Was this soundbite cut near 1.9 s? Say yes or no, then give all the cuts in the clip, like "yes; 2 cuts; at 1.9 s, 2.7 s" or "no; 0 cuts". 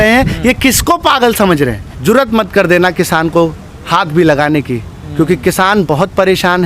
yes; 1 cut; at 1.9 s